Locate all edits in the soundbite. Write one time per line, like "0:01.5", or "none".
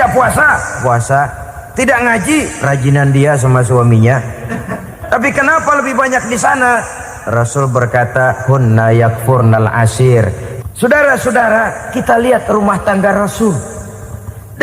0:10.5

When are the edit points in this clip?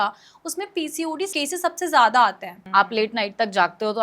0:01.3
0:02.6

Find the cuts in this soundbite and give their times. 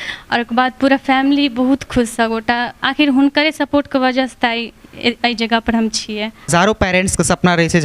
0:06.5

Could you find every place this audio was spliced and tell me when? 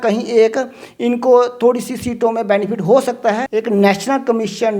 0:03.4

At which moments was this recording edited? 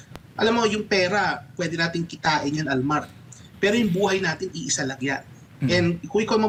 none

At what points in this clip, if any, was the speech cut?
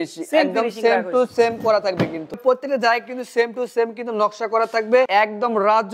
0:02.4
0:05.1

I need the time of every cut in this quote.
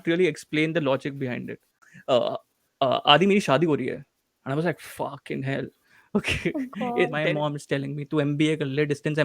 0:01.7
0:07.1

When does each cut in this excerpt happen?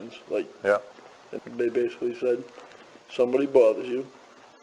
0:01.3

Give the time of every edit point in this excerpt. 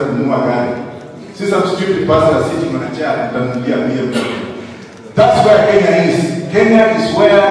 none

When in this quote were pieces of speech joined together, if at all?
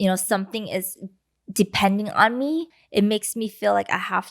0:02.8

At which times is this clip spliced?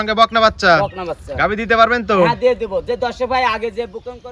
none

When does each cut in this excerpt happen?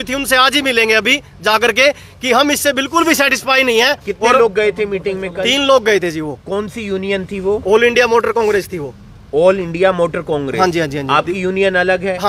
none

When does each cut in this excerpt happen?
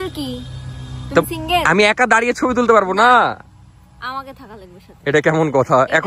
none

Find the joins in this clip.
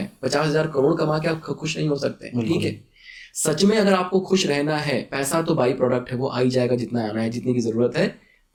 none

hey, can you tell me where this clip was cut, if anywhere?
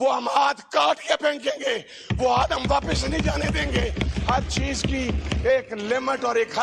none

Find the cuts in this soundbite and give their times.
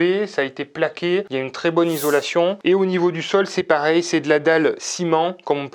none

